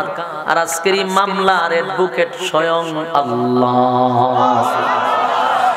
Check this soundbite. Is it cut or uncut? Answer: uncut